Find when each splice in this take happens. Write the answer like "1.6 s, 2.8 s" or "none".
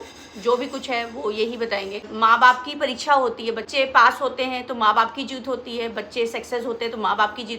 2.1 s, 3.7 s